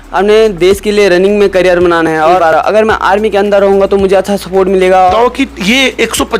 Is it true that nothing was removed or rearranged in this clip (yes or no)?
no